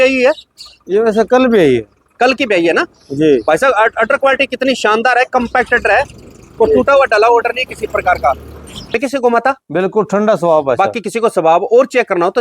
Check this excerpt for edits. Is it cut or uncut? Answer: cut